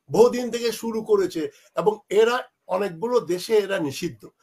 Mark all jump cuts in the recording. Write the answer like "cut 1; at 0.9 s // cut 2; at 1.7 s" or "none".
none